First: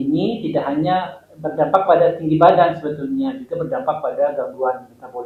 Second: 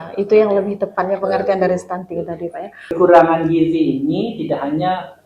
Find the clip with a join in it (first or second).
second